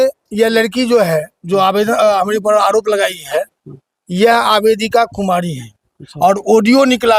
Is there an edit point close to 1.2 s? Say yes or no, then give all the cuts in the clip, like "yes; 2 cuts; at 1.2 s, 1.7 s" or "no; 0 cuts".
no; 0 cuts